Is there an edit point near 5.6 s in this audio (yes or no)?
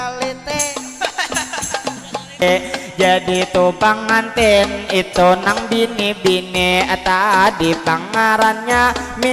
no